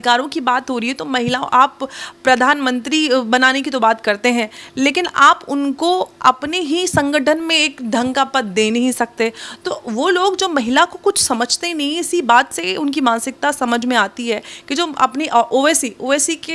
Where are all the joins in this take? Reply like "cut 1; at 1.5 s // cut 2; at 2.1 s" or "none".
none